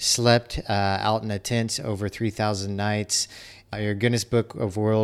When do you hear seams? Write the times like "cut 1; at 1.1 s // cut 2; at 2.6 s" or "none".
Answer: cut 1; at 3.7 s